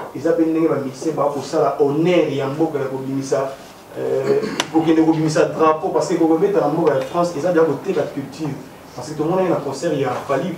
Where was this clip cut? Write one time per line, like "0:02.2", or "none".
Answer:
none